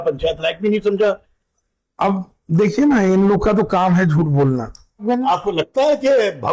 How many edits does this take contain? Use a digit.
2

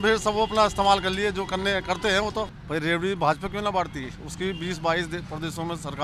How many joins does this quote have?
1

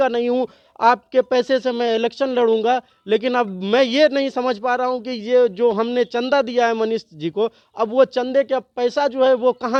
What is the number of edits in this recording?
0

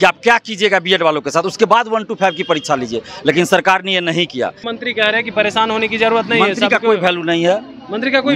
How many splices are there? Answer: 1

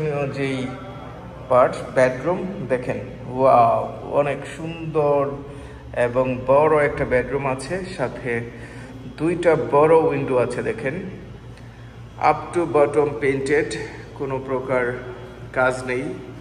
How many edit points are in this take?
0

